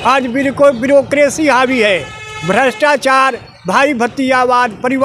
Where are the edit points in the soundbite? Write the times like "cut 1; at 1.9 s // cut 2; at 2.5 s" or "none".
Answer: none